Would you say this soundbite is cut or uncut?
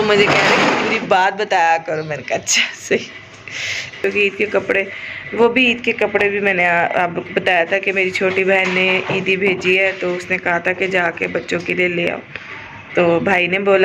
cut